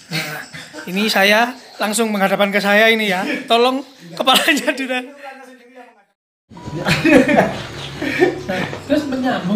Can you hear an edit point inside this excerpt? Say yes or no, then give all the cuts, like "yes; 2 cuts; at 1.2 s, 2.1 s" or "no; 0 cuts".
yes; 1 cut; at 6.1 s